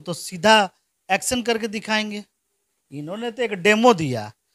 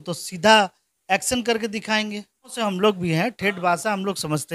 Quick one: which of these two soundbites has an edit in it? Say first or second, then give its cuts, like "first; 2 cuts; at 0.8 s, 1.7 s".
second; 1 cut; at 2.5 s